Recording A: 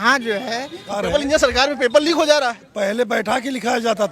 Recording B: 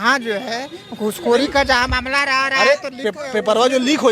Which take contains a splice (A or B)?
A